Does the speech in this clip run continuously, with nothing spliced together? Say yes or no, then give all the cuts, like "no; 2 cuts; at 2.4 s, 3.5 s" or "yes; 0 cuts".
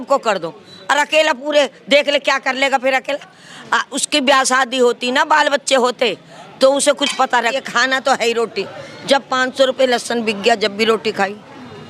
no; 1 cut; at 7.6 s